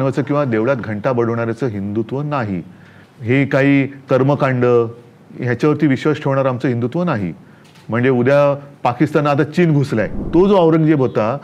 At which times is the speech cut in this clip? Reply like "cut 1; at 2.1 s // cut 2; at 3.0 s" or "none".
cut 1; at 10.2 s

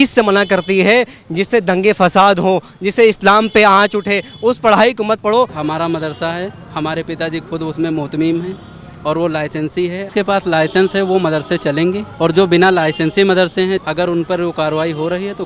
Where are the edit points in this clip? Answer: cut 1; at 5.6 s // cut 2; at 10.1 s // cut 3; at 13.8 s

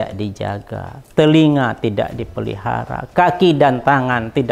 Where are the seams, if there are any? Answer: none

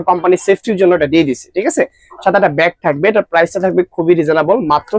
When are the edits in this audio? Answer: none

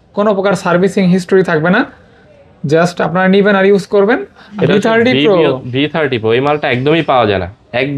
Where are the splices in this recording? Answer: cut 1; at 4.4 s

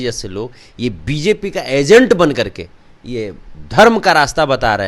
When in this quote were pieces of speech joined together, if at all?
none

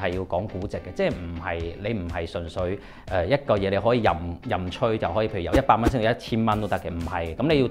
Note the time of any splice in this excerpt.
none

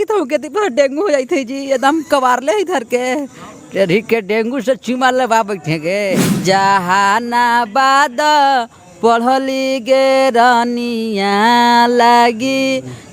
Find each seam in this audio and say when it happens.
cut 1; at 6.3 s

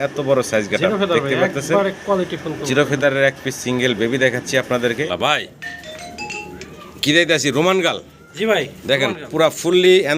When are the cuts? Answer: cut 1; at 5.1 s

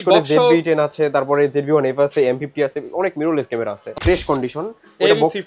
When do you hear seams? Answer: cut 1; at 4.0 s

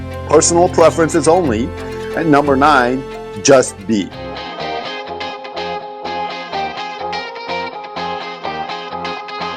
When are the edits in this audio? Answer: cut 1; at 4.1 s

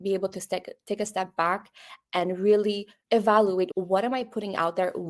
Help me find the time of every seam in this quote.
cut 1; at 2.9 s // cut 2; at 3.7 s

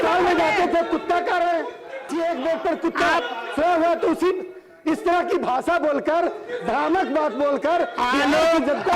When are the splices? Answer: cut 1; at 2.1 s

